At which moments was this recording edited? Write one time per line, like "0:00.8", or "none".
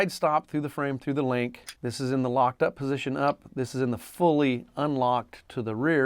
0:01.7

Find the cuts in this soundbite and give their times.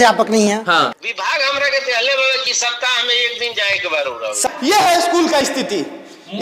0:00.9
0:04.4

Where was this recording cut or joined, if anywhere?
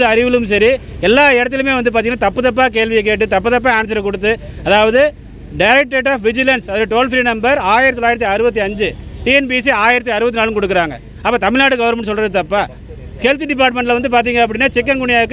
none

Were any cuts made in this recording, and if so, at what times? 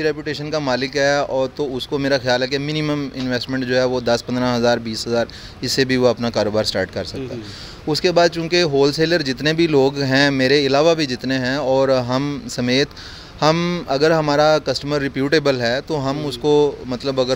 none

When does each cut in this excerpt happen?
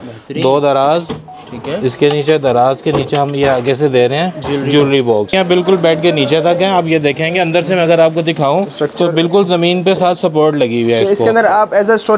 0:05.3

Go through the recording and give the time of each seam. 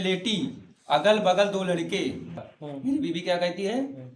0:02.5

